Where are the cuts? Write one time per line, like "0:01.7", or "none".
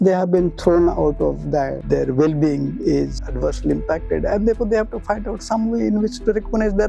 0:01.8
0:03.2

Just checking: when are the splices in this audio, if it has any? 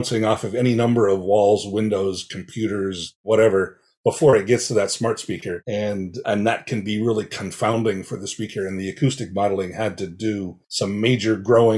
0:10.6

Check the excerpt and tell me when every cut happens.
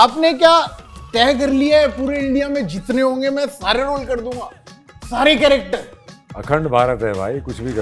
none

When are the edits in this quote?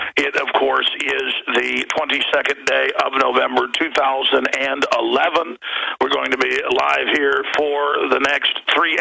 0:03.4

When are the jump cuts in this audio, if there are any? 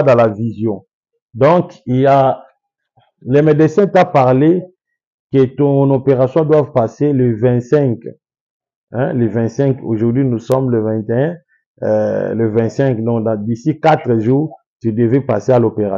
none

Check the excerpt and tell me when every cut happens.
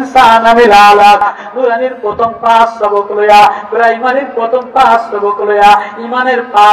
0:01.4

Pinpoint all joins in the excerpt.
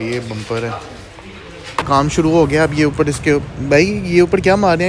0:01.9

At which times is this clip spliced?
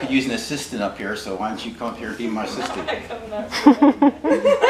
none

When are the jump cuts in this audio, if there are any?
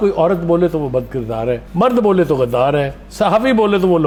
none

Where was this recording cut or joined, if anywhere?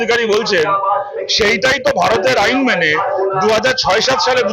none

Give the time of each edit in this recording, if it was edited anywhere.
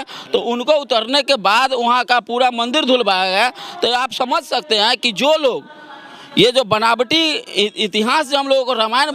none

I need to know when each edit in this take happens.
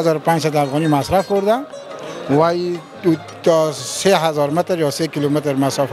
none

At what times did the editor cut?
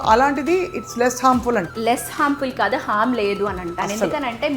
0:01.7

